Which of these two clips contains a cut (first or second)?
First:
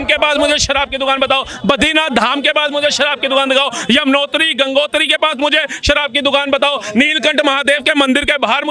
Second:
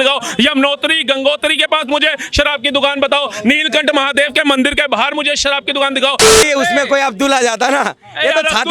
second